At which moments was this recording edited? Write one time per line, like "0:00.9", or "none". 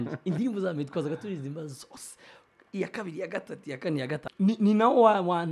0:04.2

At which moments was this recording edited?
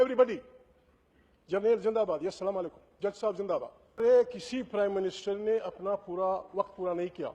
0:04.0

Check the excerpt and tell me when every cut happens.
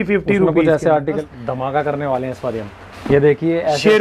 0:01.1

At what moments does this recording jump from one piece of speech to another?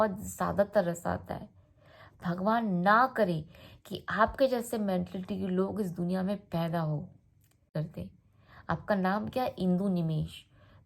0:07.7

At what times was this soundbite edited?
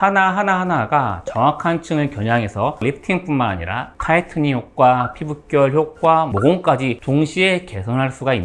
0:02.8

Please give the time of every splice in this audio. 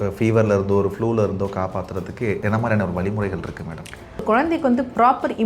0:02.4
0:04.2

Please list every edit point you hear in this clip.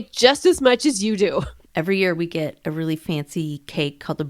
0:01.6

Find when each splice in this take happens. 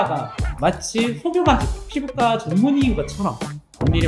0:01.8

